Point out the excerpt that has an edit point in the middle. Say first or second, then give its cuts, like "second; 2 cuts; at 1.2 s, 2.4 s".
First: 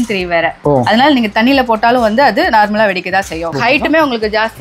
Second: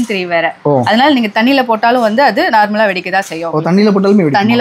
first; 1 cut; at 3.5 s